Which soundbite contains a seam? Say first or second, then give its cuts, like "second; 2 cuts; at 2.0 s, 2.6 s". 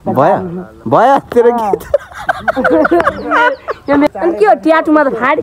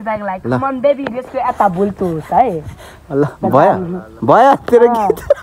first; 1 cut; at 4.1 s